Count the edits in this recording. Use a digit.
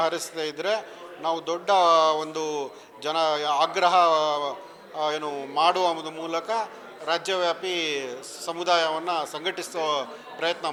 0